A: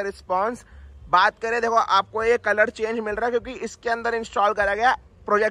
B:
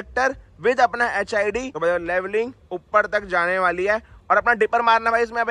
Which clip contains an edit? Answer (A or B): B